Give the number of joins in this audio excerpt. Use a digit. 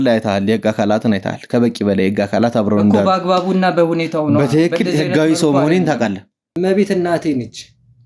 1